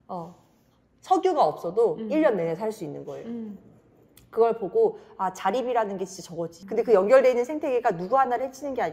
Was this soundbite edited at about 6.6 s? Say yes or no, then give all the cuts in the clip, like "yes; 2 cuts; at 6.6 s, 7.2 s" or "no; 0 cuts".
yes; 1 cut; at 6.6 s